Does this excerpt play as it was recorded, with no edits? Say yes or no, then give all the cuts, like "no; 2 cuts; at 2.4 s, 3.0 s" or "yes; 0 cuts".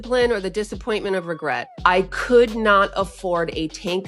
no; 1 cut; at 1.7 s